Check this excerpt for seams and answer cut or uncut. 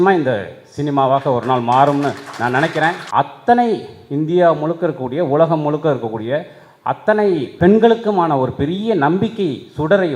cut